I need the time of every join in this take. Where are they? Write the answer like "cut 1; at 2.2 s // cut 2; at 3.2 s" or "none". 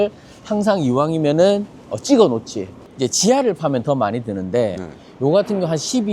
cut 1; at 2.8 s